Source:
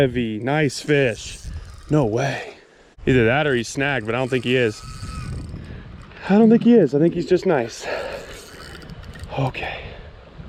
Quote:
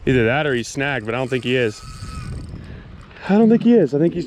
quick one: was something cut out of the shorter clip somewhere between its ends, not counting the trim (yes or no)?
no